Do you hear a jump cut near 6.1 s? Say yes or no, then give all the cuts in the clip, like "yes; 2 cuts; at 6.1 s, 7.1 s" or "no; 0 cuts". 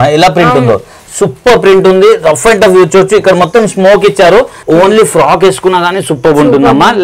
no; 1 cut; at 4.6 s